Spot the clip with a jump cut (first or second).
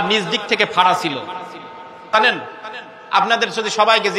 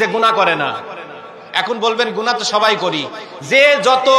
first